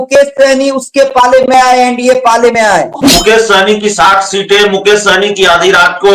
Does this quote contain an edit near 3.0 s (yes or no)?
yes